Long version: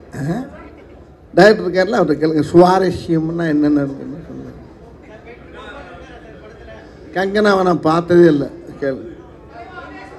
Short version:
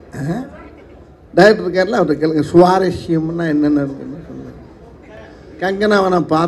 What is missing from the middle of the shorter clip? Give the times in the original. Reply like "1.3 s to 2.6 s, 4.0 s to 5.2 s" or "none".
5.2 s to 6.7 s